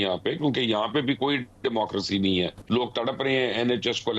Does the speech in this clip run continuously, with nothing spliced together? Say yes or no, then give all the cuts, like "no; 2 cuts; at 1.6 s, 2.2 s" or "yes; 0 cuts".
no; 1 cut; at 2.6 s